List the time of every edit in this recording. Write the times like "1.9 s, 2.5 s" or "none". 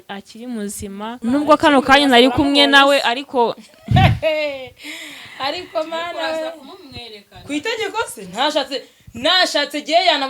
1.2 s